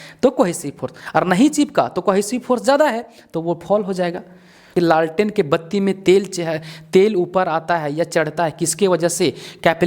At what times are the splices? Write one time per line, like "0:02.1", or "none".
0:04.7